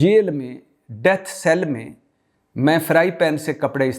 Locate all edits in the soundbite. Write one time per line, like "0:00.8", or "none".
none